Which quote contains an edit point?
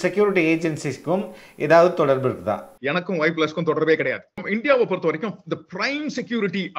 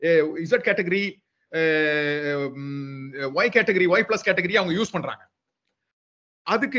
first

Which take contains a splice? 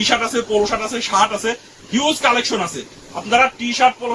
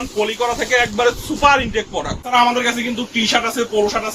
second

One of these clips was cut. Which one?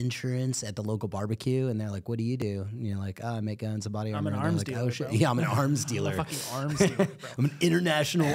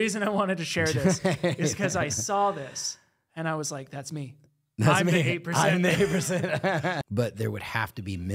second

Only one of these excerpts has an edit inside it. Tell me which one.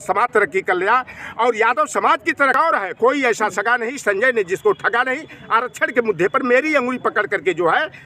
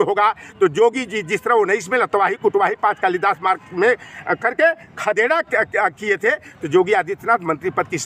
first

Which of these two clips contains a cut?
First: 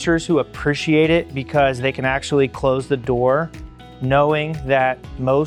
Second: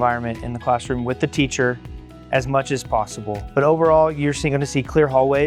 second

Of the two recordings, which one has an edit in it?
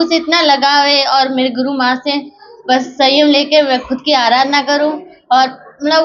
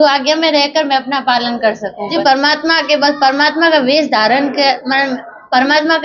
second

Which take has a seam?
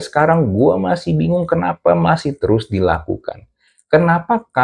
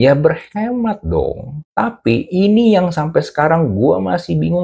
second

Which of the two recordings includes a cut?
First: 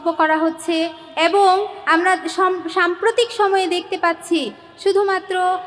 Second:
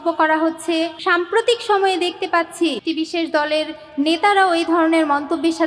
second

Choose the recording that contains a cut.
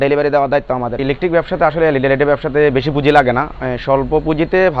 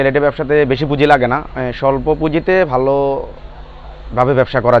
first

